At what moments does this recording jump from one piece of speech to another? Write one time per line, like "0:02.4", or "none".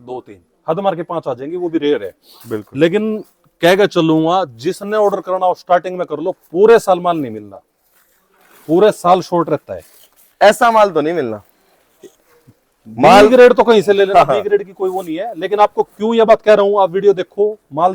none